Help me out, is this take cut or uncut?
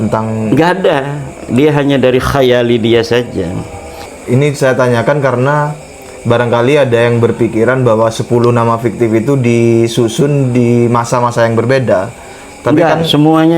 cut